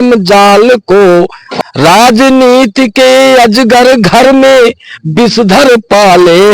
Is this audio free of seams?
no; 1 cut; at 1.4 s

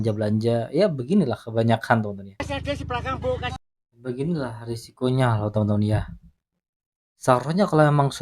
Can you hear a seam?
yes; 1 cut; at 2.4 s

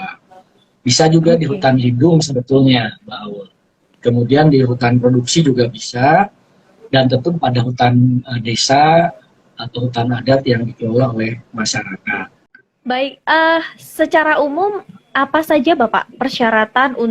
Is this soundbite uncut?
no; 1 cut; at 12.6 s

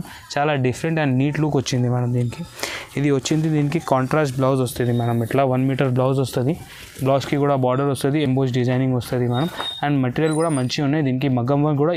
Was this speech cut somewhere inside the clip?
no; 0 cuts

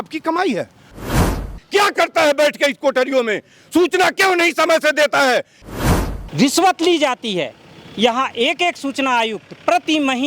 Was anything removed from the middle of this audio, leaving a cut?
yes; 2 cuts; at 1.1 s, 5.7 s

